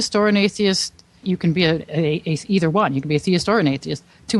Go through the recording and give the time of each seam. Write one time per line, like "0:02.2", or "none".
0:01.2